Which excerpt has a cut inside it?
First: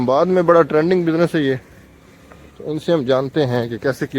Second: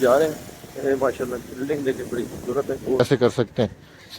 second; 1 cut; at 3.0 s

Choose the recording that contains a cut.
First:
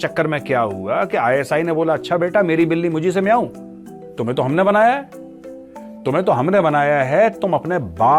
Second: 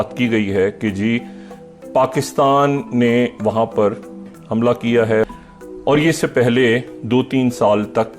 second; 2 cuts; at 4.3 s, 5.2 s

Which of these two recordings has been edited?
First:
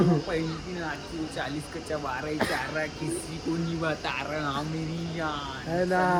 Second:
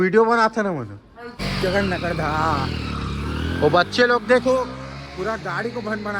second; 1 cut; at 1.4 s

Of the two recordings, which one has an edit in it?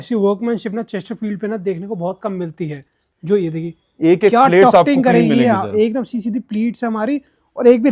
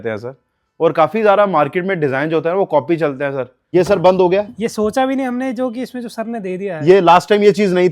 second; 1 cut; at 3.5 s

